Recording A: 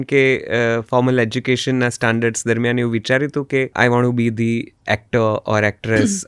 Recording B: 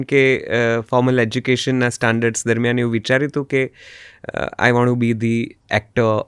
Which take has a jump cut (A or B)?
A